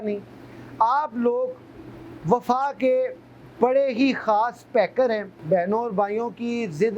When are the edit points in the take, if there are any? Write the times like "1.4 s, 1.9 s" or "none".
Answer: 5.3 s